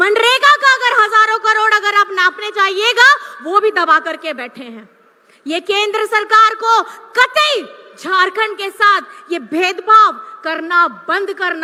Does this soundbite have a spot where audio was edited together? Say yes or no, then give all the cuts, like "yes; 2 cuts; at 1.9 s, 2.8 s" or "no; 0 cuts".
no; 0 cuts